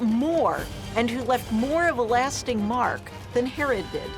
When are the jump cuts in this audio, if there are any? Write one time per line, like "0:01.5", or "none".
0:03.1